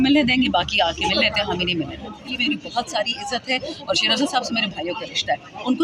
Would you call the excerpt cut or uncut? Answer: cut